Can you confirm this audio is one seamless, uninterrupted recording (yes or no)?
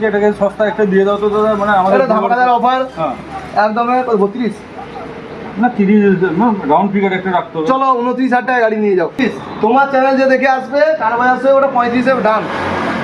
no